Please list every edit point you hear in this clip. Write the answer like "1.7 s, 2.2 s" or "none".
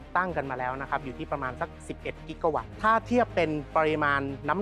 2.7 s, 3.7 s